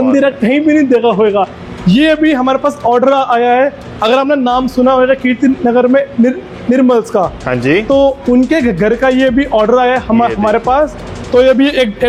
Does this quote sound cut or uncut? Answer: uncut